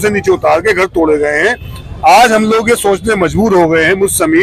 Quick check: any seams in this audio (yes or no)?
no